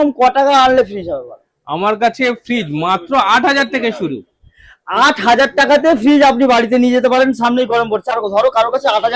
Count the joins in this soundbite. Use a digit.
1